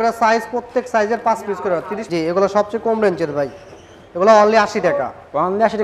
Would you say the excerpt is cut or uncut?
cut